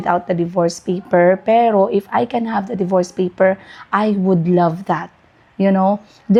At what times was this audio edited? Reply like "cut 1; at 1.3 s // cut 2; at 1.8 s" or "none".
none